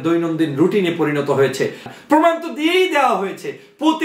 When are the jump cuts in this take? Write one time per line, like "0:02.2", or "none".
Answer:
0:01.9